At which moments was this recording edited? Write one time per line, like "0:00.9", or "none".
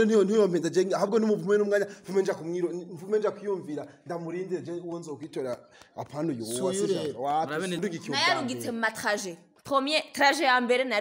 0:07.8

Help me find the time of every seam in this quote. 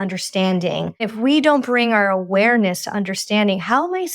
0:01.1

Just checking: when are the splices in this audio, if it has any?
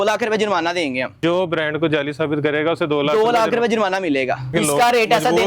0:01.2
0:04.5

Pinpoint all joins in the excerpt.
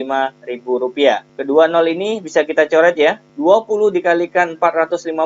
0:01.3
0:03.3

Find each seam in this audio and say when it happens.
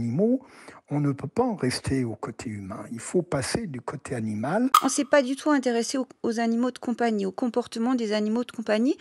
0:04.8

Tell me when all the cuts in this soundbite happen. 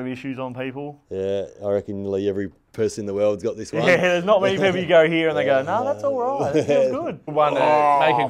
0:07.3

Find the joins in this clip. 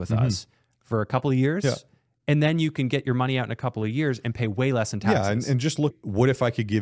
0:05.9

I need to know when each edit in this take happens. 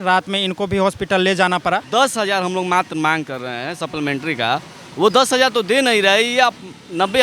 0:01.8

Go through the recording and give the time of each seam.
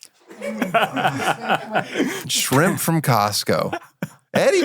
0:02.2

